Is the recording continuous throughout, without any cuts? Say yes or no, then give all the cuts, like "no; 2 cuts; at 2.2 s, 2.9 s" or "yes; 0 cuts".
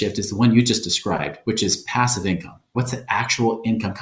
no; 1 cut; at 2.7 s